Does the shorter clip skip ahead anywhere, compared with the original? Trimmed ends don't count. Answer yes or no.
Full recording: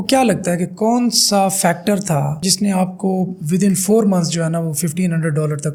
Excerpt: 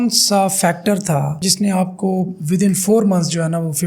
no